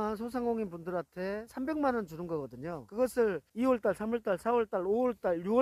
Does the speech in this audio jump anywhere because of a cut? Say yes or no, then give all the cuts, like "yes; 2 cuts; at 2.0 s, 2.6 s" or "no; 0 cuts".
yes; 3 cuts; at 1.5 s, 2.8 s, 3.5 s